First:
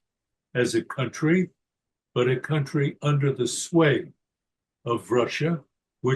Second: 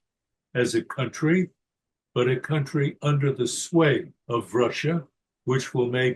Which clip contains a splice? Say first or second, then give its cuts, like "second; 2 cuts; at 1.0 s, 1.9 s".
second; 1 cut; at 4.2 s